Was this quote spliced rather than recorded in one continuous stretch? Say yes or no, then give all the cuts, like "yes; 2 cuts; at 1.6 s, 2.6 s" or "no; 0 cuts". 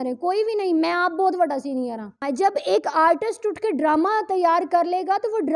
yes; 1 cut; at 2.2 s